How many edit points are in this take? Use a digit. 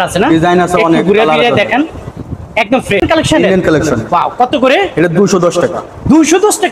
1